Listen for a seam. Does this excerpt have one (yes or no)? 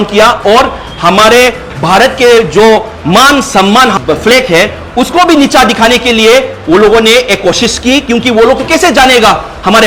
no